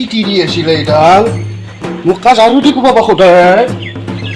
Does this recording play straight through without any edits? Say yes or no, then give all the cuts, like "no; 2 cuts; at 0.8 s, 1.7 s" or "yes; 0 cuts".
yes; 0 cuts